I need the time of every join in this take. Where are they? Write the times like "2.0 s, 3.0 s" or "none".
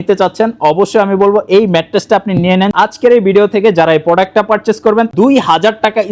2.7 s, 5.1 s